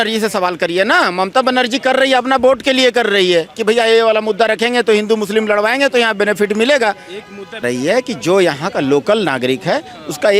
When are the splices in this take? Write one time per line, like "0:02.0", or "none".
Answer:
0:07.6